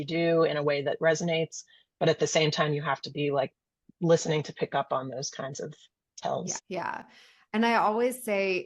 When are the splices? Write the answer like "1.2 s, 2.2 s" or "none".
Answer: 6.6 s